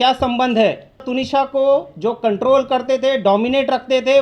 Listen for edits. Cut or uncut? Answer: cut